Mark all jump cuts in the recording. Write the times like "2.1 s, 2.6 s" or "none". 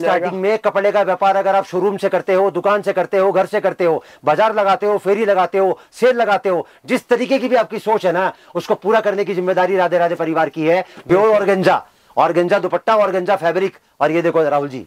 11.1 s